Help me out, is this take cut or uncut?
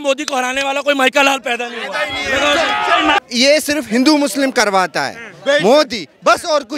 cut